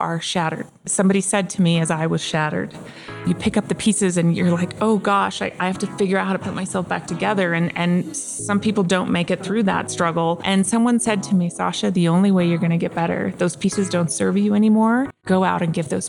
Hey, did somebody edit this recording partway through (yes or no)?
yes